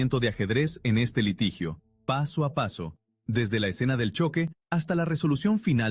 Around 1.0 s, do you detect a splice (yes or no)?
no